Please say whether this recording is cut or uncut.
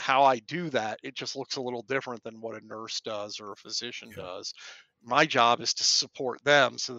uncut